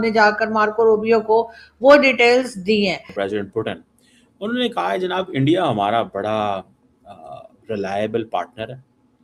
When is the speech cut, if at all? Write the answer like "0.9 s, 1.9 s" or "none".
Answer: 3.1 s